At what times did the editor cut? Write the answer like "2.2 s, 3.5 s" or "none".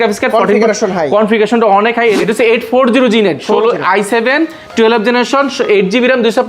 2.2 s